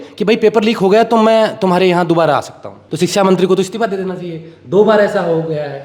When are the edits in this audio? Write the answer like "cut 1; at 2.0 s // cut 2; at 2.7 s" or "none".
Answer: cut 1; at 2.8 s